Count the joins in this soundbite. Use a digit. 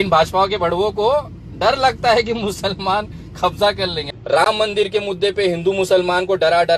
1